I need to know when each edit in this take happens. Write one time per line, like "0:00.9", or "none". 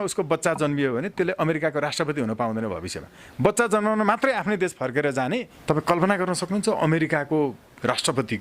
0:05.5